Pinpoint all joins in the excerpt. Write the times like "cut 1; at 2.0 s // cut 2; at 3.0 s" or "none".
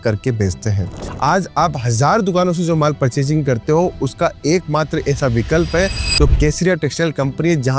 cut 1; at 1.0 s